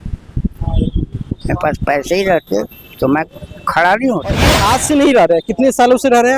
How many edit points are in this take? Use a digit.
1